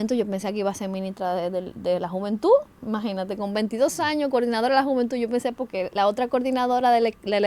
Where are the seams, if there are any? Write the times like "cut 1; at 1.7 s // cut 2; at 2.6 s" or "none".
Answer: none